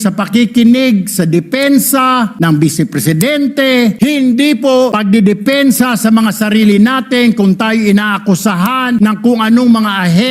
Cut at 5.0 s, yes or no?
yes